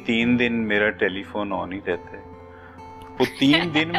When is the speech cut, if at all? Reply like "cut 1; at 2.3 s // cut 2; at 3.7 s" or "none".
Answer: none